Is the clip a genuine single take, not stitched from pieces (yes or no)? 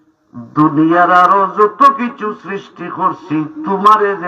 yes